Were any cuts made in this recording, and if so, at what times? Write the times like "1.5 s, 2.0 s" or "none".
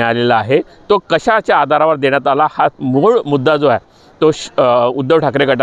none

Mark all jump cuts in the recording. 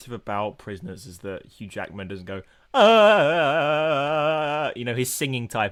none

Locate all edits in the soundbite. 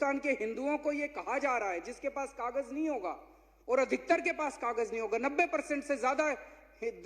none

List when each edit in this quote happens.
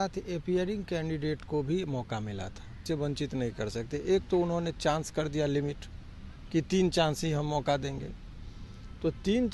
2.8 s

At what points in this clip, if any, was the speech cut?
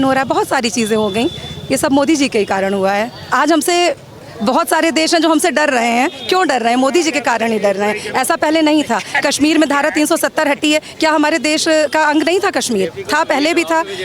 3.2 s

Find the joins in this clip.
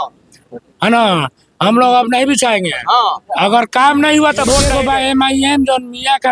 4.7 s

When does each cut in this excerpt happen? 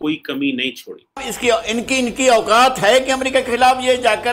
1.3 s

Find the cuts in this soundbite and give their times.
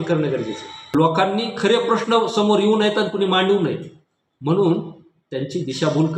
0.9 s

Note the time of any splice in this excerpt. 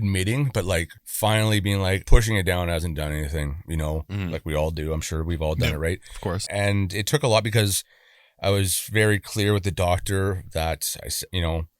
1.0 s, 2.0 s, 6.4 s

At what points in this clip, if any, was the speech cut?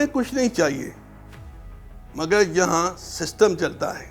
none

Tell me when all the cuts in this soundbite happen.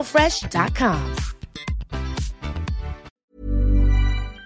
3.3 s

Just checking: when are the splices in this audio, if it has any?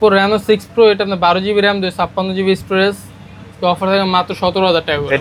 none

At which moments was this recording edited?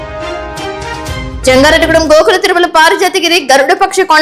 none

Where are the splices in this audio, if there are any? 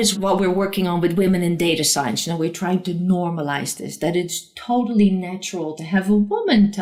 none

